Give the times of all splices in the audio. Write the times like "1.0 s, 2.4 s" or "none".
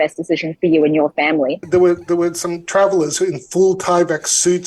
1.6 s

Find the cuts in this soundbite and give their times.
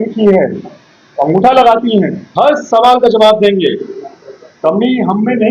2.2 s

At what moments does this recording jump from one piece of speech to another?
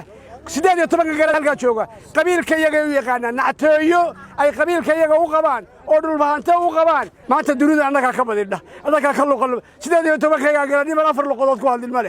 1.3 s, 7.1 s

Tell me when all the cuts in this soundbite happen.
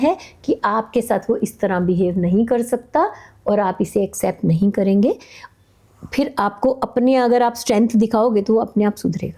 none

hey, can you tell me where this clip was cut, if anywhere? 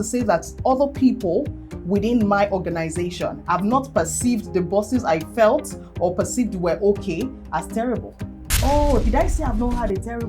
8.5 s

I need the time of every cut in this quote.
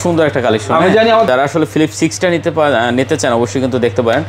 1.3 s

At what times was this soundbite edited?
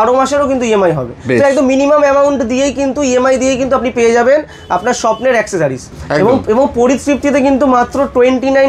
none

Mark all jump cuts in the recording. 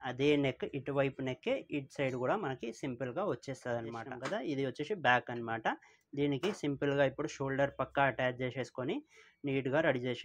4.1 s

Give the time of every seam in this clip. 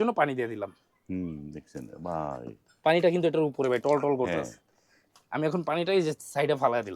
none

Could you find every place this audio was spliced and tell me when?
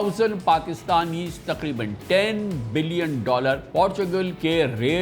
3.6 s

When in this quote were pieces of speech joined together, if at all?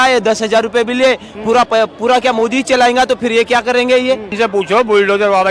4.3 s

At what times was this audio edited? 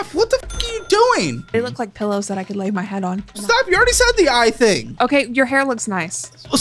1.5 s, 3.4 s, 4.9 s

